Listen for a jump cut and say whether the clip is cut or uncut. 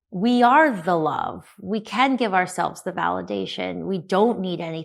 uncut